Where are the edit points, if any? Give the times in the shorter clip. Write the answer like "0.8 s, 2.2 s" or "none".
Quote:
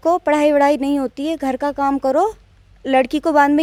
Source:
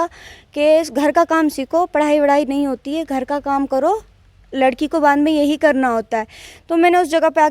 none